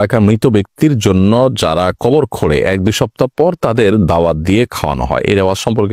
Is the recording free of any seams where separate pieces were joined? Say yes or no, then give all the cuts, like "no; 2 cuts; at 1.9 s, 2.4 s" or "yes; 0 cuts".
yes; 0 cuts